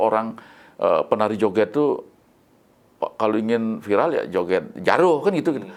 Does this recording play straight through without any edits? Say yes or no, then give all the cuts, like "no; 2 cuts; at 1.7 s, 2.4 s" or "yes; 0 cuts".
yes; 0 cuts